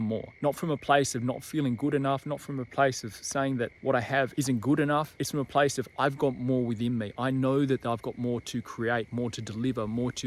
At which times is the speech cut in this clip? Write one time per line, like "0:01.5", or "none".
0:04.0
0:05.2